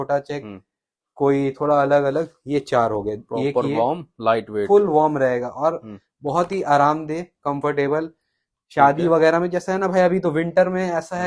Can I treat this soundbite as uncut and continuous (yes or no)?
yes